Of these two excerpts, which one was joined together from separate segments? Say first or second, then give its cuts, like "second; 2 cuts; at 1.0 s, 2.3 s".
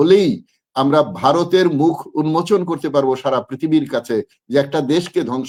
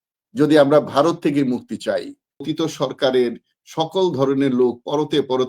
second; 1 cut; at 2.5 s